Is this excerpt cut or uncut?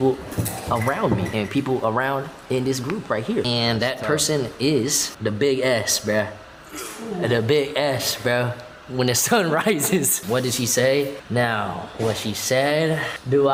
uncut